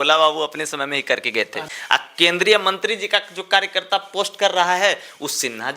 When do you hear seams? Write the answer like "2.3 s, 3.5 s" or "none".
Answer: 1.6 s